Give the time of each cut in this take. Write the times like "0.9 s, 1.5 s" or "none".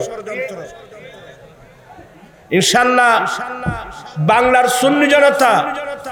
none